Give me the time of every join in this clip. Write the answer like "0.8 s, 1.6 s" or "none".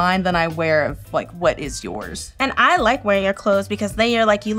2.2 s